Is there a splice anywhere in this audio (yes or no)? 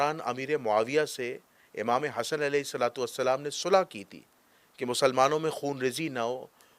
no